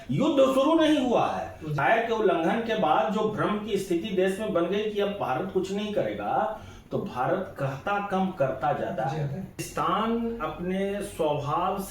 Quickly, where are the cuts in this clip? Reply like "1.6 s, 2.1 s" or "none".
1.7 s, 9.7 s